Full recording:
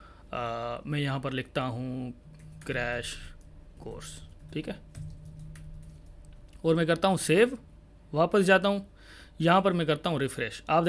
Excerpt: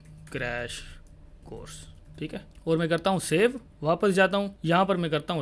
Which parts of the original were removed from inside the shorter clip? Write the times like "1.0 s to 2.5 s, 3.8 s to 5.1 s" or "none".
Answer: 4.9 s to 6.5 s, 7.7 s to 8.0 s, 8.9 s to 9.3 s